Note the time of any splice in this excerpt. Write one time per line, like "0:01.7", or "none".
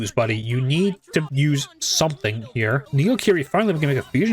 0:01.3
0:02.9